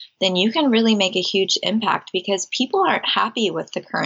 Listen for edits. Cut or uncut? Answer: uncut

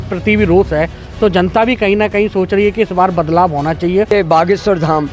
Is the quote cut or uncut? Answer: cut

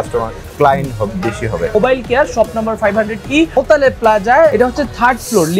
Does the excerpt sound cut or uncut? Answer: cut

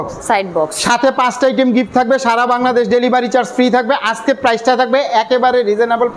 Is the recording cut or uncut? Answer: uncut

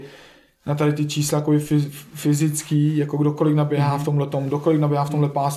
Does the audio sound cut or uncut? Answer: uncut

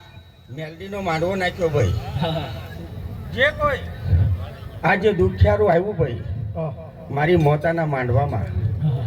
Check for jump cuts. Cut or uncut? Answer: uncut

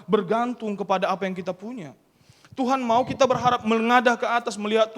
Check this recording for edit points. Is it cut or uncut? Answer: uncut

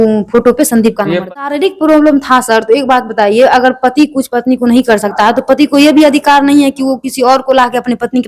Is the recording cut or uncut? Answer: cut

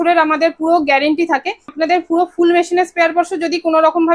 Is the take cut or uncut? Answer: cut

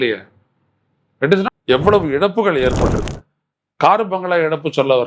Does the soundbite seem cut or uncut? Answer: cut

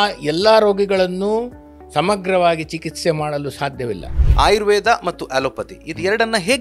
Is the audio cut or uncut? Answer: cut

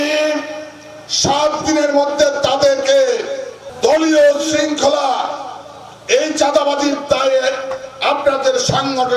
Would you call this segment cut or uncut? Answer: uncut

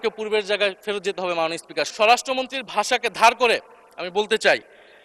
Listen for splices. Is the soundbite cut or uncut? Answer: cut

